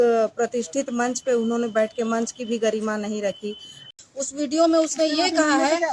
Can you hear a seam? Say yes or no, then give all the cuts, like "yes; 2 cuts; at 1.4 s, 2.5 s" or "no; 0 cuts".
yes; 1 cut; at 3.8 s